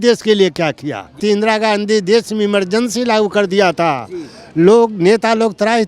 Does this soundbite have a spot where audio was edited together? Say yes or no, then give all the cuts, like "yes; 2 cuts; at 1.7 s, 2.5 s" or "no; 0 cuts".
yes; 1 cut; at 1.2 s